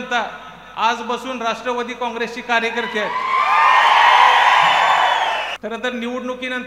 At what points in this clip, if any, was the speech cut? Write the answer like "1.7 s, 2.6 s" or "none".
5.5 s